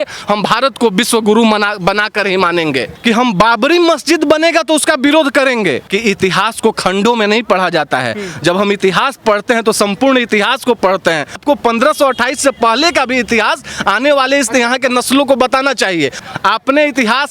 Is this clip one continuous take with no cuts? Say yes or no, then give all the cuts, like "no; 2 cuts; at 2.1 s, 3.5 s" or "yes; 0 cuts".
no; 4 cuts; at 2.9 s, 5.9 s, 11.3 s, 16.2 s